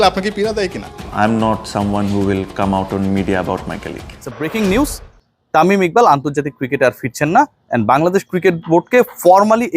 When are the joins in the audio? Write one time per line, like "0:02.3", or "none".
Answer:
0:00.9
0:04.0